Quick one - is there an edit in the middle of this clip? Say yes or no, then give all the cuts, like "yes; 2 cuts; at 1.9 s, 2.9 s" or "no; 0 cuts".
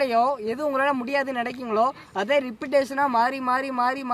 no; 0 cuts